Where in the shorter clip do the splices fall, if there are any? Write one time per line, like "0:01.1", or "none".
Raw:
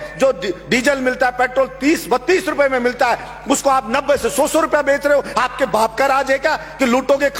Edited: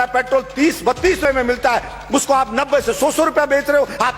0:01.3

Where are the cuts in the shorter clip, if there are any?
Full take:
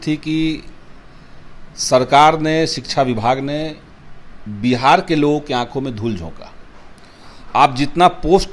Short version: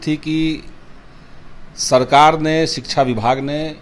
none

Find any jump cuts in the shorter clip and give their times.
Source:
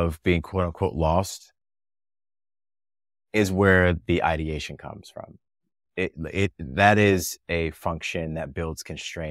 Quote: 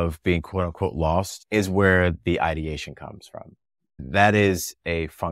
0:01.4
0:04.0

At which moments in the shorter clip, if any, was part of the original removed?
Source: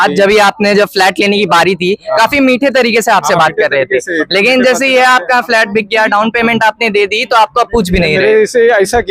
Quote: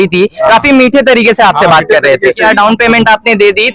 0:02.4

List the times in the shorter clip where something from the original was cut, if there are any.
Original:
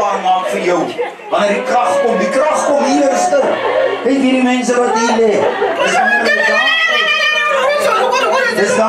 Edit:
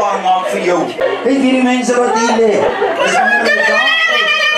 0:01.0

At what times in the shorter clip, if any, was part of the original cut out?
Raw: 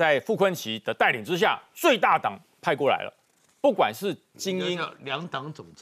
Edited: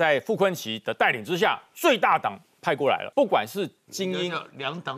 0:03.1

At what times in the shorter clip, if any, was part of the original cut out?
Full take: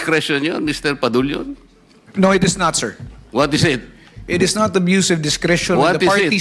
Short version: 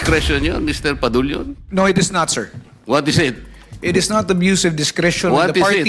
0:01.6

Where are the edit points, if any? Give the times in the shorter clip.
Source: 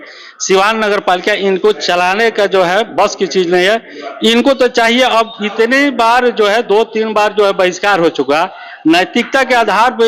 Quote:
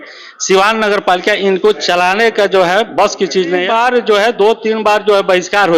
0:03.7

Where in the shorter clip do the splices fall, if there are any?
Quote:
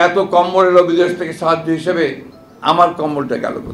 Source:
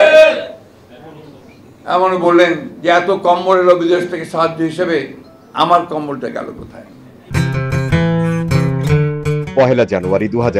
none

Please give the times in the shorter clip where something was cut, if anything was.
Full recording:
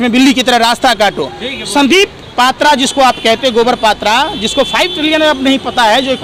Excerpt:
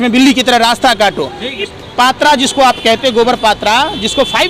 0:01.7

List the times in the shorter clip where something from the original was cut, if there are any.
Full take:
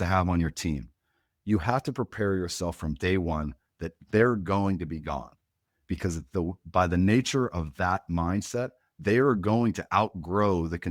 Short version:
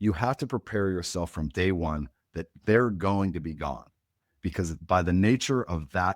0:04.8

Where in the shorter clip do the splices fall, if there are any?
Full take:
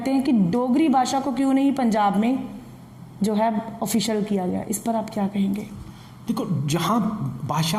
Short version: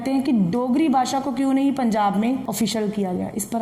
0:02.5

